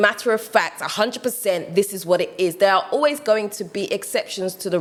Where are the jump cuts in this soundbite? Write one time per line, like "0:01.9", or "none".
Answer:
none